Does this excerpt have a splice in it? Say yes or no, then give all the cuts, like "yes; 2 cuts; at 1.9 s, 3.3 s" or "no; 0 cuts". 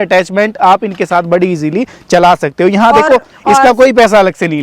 yes; 1 cut; at 3.3 s